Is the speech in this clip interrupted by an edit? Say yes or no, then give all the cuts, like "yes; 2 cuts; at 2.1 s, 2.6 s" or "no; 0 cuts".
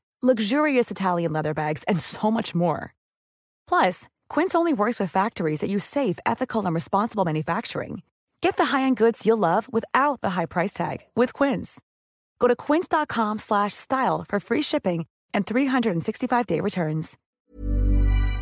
yes; 1 cut; at 17.2 s